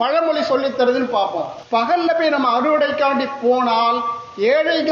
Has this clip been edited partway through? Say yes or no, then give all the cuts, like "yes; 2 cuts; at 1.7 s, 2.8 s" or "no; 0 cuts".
yes; 1 cut; at 1.5 s